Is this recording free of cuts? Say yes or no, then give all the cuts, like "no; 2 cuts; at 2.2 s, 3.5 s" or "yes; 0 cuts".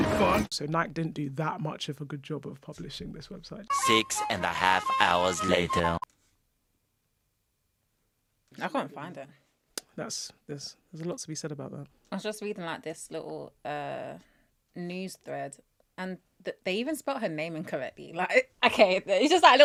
yes; 0 cuts